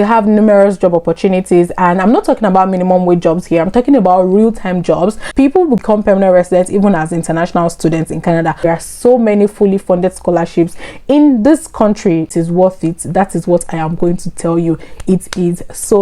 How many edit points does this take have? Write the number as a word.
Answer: three